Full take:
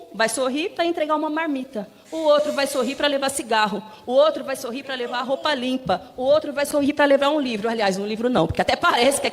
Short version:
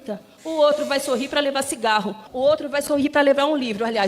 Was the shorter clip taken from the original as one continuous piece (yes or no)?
no